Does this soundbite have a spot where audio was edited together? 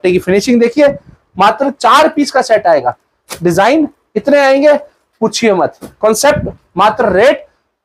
no; 0 cuts

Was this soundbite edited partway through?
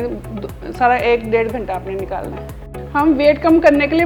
yes; 1 cut; at 2.7 s

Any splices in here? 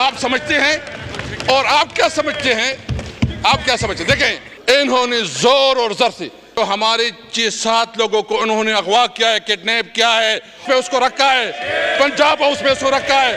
yes; 3 cuts; at 4.5 s, 6.6 s, 10.5 s

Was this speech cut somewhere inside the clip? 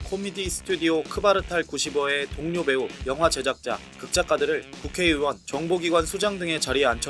no; 0 cuts

